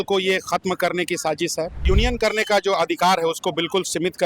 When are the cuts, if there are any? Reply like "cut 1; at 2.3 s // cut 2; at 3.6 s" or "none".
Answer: cut 1; at 1.8 s